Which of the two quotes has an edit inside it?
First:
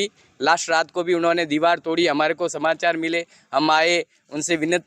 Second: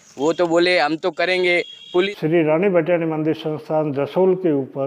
second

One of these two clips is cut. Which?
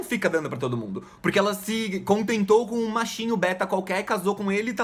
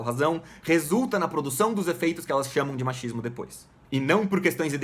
second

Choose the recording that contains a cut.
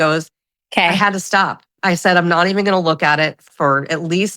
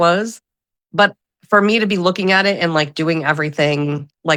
first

